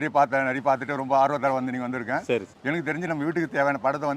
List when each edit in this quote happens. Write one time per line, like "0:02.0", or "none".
0:02.2